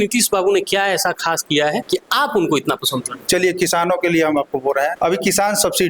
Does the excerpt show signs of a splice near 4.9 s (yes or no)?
yes